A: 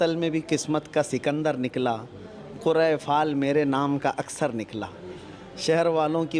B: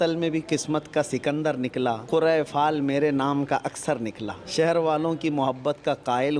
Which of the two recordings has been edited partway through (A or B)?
B